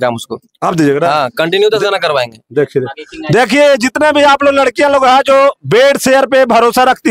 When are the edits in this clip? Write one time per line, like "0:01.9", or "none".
none